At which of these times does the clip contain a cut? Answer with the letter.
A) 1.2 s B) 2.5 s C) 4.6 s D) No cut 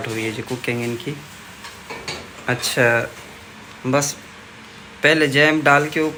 D